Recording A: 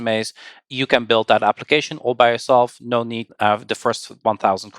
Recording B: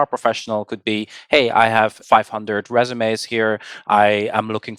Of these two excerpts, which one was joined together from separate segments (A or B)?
A